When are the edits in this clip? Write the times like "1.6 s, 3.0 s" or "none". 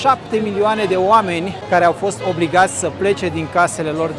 none